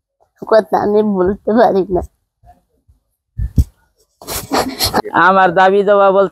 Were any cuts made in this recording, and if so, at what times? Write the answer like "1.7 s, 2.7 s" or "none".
5.0 s